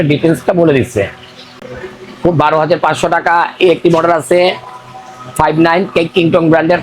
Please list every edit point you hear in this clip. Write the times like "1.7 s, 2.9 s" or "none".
1.7 s